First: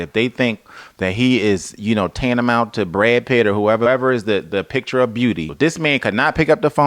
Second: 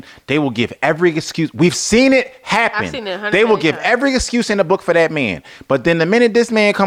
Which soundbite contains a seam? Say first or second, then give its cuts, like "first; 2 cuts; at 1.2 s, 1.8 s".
first; 2 cuts; at 3.9 s, 5.5 s